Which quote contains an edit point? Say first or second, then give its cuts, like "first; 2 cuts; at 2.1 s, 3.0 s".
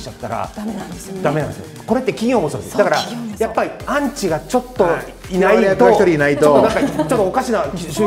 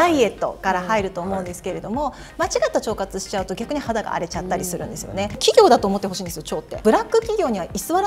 second; 2 cuts; at 5.4 s, 6.8 s